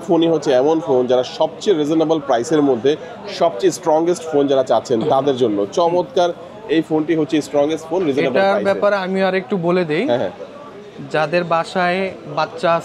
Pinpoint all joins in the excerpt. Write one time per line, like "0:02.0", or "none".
none